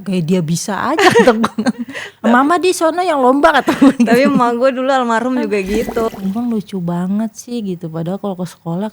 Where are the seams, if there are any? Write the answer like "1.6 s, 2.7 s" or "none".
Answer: 6.1 s

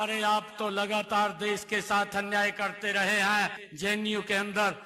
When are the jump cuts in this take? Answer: 3.6 s

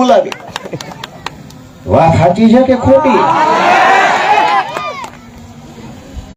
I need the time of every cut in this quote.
none

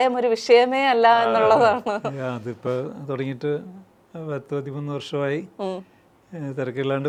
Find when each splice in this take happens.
none

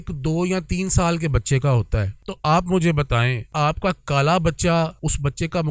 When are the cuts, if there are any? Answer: 2.2 s, 3.4 s, 4.9 s

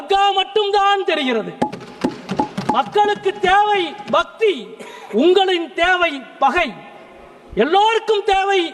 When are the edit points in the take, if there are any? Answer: none

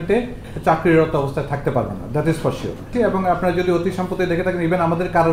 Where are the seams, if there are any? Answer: 2.9 s

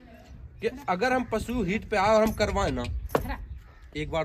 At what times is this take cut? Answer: none

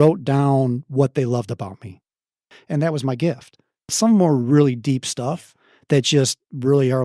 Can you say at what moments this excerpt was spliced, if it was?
2.5 s, 3.9 s

